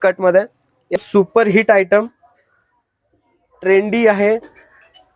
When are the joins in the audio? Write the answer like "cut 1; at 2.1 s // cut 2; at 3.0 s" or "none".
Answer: cut 1; at 0.9 s